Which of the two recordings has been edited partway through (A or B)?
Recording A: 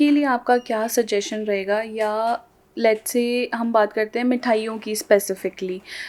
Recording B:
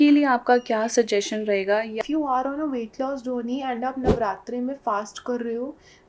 B